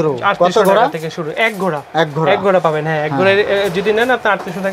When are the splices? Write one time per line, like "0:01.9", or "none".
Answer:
none